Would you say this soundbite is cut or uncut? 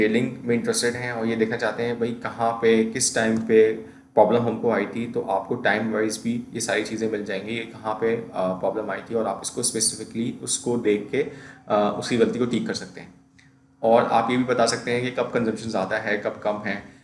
uncut